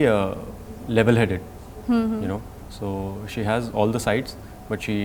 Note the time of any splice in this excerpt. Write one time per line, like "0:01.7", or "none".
none

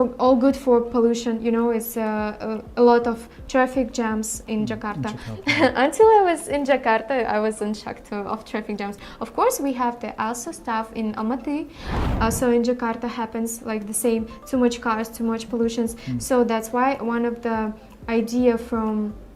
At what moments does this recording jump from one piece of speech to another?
0:12.0

